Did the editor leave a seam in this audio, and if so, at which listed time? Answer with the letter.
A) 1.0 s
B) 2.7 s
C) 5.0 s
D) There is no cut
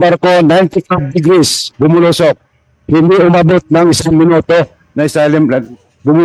D